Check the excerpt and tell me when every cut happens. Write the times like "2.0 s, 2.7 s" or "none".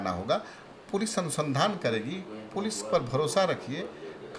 none